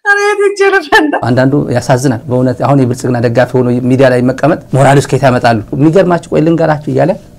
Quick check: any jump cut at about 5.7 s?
yes; 3 cuts; at 1.2 s, 4.7 s, 5.7 s

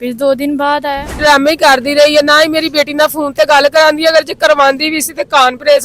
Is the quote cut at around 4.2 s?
no; 1 cut; at 1.2 s

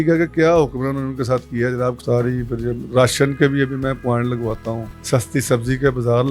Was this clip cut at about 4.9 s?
yes; 2 cuts; at 2.0 s, 4.9 s

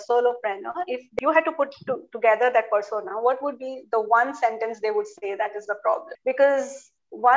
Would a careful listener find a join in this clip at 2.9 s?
no; 2 cuts; at 1.1 s, 6.1 s

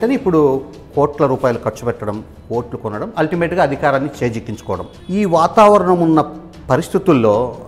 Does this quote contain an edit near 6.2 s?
no; 1 cut; at 4.9 s

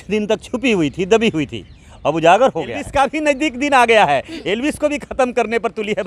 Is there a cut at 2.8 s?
yes; 1 cut; at 2.8 s

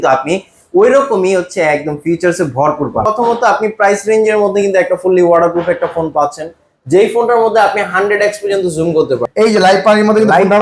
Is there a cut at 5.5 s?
no; 2 cuts; at 3.0 s, 9.3 s

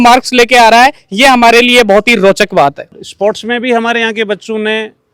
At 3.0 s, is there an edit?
yes; 1 cut; at 3.0 s

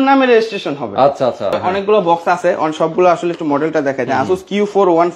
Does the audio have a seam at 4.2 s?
no; 1 cut; at 1.6 s

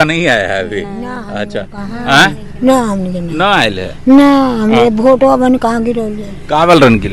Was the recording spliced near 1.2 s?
no; 0 cuts

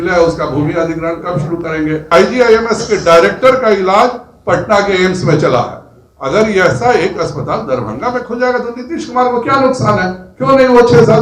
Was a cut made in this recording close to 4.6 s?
no; 1 cut; at 2.1 s

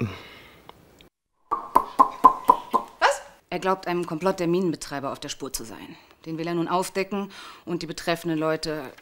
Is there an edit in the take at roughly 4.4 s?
yes; 1 cut; at 4.4 s

